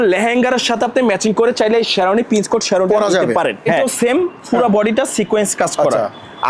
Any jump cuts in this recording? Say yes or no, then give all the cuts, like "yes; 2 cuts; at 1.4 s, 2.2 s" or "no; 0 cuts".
yes; 1 cut; at 3.8 s